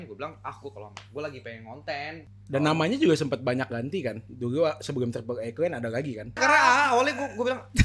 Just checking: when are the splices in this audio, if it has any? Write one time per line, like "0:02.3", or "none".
0:02.3
0:06.4